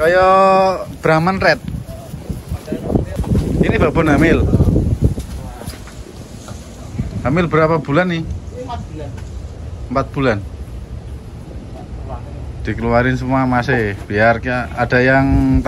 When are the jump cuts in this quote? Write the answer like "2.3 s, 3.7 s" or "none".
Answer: 3.2 s